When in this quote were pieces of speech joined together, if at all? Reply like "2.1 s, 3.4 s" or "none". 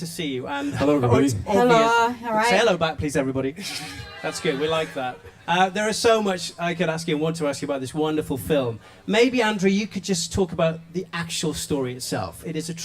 11.6 s